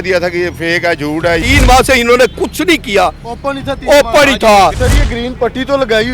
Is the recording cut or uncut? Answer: cut